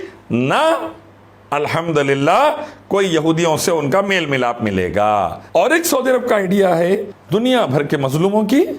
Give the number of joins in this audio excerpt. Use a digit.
1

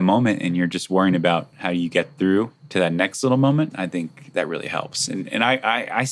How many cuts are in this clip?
1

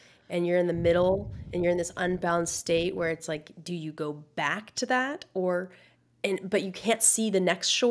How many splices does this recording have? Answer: 0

